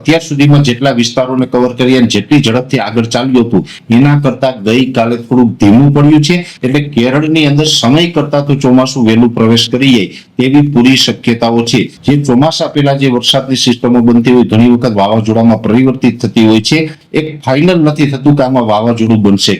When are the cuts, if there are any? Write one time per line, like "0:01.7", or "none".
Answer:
0:06.5
0:11.9
0:17.0